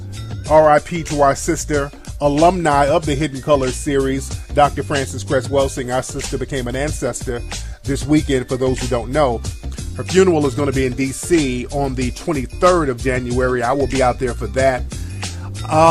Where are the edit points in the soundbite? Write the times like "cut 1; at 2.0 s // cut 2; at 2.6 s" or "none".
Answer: cut 1; at 13.2 s